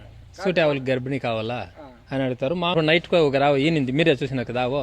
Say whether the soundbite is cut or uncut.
cut